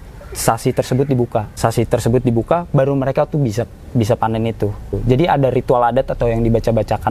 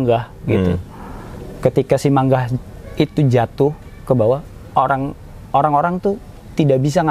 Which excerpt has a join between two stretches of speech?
first; 2 cuts; at 1.5 s, 5.0 s

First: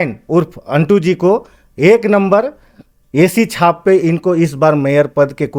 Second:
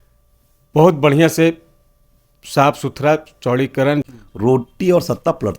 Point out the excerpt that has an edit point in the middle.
second; 1 cut; at 4.0 s

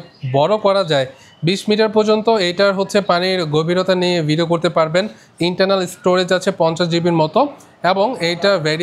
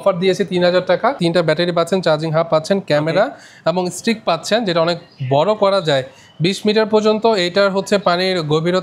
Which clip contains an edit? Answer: second; 1 cut; at 1.2 s

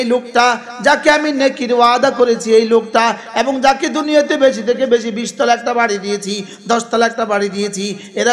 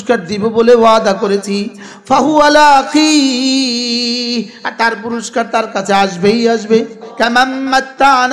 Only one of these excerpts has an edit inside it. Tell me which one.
second; 1 cut; at 7.0 s

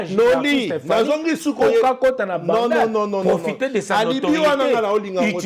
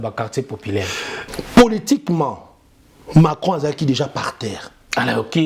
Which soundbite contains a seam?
second; 1 cut; at 1.2 s

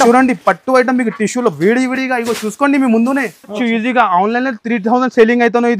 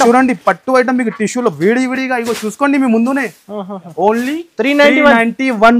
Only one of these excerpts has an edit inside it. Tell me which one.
first; 1 cut; at 3.6 s

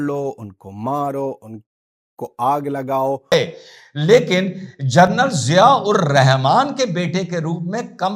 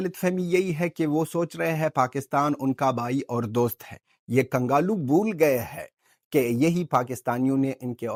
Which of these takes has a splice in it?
first; 1 cut; at 3.3 s

